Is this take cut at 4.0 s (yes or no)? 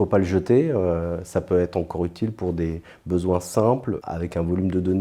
yes